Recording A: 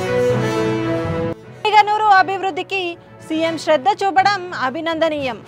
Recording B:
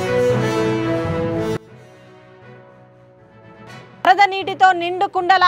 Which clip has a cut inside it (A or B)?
B